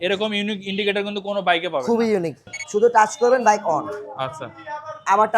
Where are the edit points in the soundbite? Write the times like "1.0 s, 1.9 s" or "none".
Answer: 2.5 s